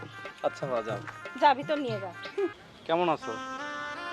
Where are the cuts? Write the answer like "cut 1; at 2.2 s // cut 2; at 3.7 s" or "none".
cut 1; at 2.7 s